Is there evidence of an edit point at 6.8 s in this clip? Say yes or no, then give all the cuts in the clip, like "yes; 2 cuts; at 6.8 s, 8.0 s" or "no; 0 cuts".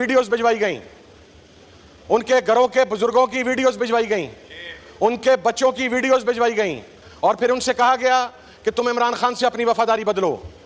no; 0 cuts